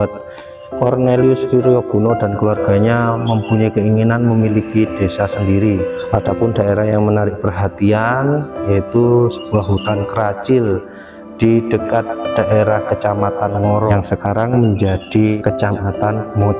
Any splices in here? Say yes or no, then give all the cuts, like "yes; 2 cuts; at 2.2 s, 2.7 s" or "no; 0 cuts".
yes; 3 cuts; at 5.9 s, 13.9 s, 15.4 s